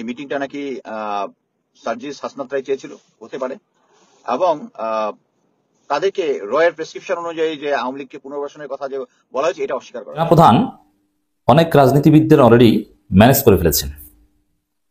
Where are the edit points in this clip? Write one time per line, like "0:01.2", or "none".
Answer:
0:10.2